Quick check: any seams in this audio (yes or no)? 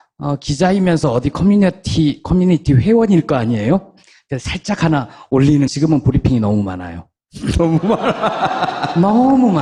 no